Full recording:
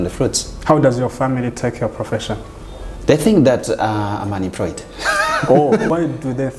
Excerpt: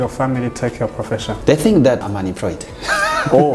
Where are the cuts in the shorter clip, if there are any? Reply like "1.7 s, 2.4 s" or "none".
1.4 s, 2.0 s